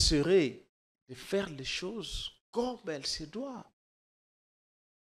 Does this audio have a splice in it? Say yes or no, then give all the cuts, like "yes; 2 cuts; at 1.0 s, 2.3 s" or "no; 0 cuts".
no; 0 cuts